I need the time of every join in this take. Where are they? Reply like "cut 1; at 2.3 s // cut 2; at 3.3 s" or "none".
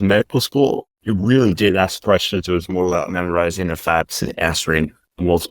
cut 1; at 0.9 s